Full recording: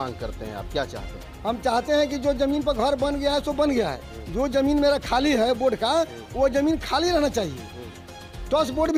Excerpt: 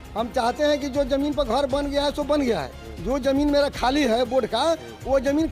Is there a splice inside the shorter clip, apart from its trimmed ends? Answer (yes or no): no